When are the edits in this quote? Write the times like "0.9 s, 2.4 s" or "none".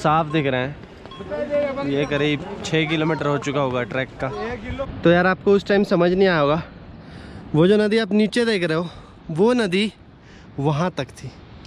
4.7 s